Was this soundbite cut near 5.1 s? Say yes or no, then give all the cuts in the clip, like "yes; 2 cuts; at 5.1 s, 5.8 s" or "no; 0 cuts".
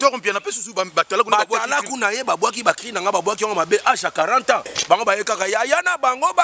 no; 0 cuts